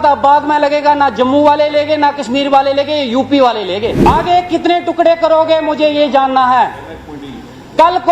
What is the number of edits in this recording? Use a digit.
1